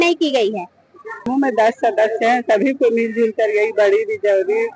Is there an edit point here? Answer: yes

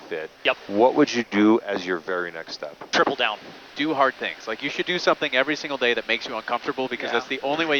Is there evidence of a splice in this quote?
yes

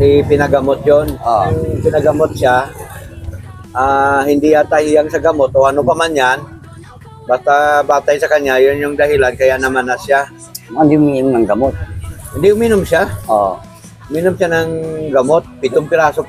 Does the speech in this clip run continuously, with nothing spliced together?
no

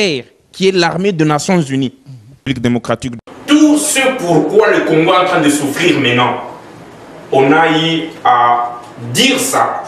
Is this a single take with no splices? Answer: no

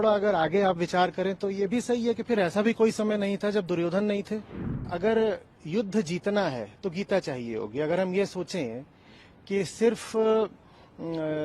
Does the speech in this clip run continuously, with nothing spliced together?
no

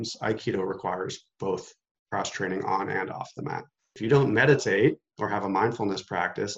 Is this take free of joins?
no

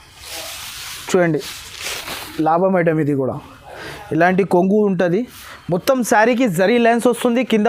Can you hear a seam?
no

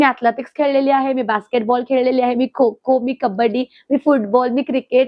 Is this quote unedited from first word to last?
yes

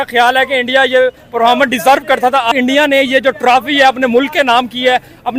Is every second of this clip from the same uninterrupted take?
yes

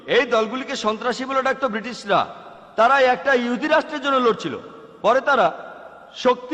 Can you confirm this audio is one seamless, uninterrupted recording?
yes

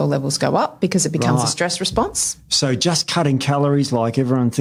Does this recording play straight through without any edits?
yes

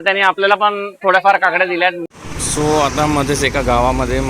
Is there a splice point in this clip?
yes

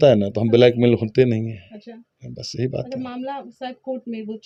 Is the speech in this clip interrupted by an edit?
no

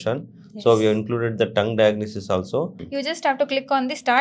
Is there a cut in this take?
yes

